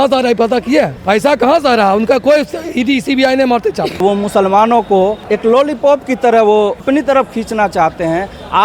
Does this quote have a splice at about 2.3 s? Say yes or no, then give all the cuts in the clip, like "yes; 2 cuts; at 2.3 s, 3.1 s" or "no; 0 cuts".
no; 4 cuts; at 1.0 s, 4.0 s, 5.2 s, 6.8 s